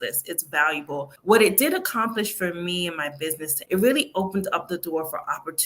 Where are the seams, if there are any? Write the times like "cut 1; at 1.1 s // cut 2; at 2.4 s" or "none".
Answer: cut 1; at 1.1 s // cut 2; at 3.5 s